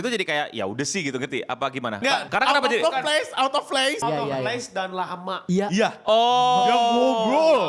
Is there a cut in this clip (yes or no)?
yes